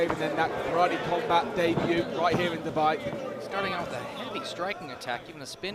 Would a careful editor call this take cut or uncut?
uncut